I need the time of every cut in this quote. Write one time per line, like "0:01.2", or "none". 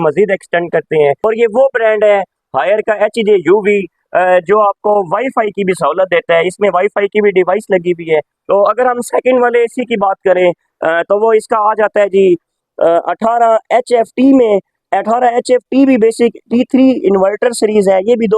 0:01.2
0:08.3